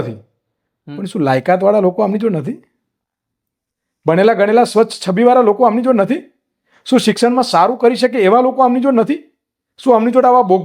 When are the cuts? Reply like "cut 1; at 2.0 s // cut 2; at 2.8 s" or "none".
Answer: none